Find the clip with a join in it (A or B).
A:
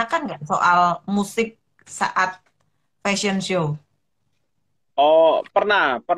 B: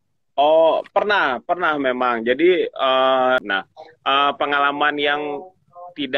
B